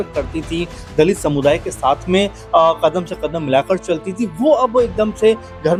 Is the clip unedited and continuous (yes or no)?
yes